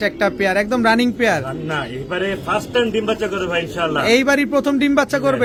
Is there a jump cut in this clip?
no; 0 cuts

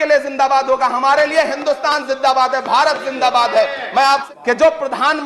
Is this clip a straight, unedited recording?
no; 1 cut; at 4.2 s

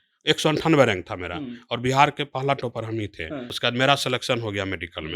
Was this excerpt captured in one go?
no; 1 cut; at 3.5 s

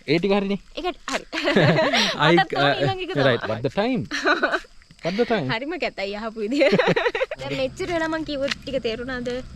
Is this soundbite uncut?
no; 2 cuts; at 3.4 s, 7.5 s

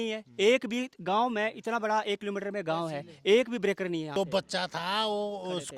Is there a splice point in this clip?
yes; 1 cut; at 4.1 s

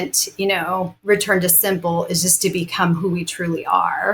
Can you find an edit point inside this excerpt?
yes; 1 cut; at 1.0 s

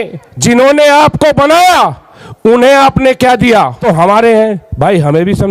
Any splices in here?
yes; 1 cut; at 3.8 s

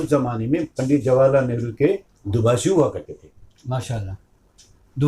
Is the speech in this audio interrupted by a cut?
no; 0 cuts

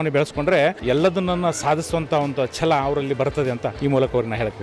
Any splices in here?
yes; 2 cuts; at 0.8 s, 3.7 s

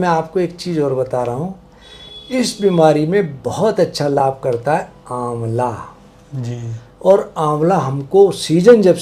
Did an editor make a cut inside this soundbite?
no; 0 cuts

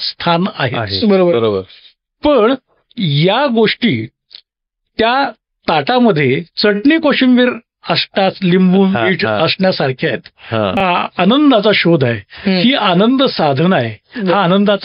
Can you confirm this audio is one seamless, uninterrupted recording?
no; 1 cut; at 10.8 s

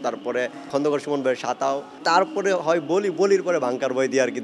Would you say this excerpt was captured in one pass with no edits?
yes; 0 cuts

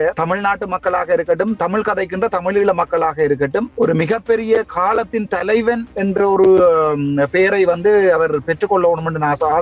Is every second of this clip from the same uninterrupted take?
no; 1 cut; at 1.6 s

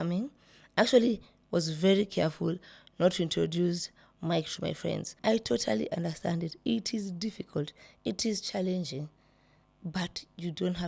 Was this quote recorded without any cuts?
no; 1 cut; at 5.1 s

